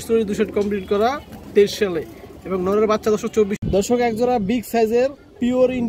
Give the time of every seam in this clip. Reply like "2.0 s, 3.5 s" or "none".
3.6 s